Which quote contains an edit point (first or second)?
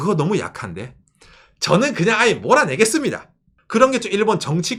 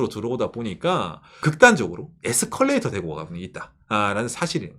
second